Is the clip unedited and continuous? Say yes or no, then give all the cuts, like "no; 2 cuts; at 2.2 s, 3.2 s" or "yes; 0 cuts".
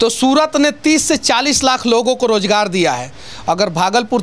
yes; 0 cuts